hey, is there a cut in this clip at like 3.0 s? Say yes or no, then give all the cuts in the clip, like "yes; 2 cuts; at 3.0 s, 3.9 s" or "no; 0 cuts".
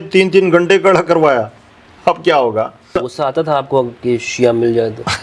yes; 1 cut; at 3.0 s